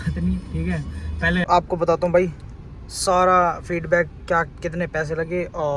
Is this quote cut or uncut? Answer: cut